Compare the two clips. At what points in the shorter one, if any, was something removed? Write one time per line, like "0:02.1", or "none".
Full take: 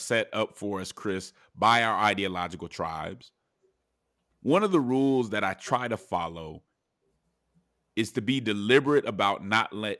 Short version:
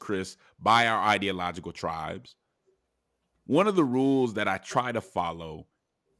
none